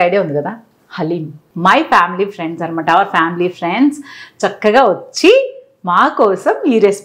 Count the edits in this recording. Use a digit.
1